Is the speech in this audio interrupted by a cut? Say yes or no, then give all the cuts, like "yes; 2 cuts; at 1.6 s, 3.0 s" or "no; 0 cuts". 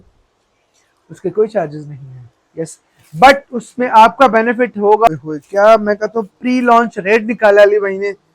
yes; 1 cut; at 5.1 s